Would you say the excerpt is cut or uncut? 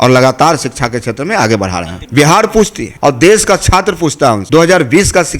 cut